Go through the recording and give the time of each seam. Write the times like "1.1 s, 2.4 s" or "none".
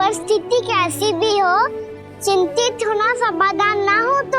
none